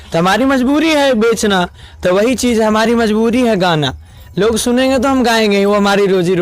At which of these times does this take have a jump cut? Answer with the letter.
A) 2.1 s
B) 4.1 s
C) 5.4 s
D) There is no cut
D